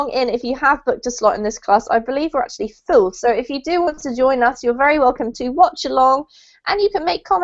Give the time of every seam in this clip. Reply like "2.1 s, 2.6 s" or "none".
2.8 s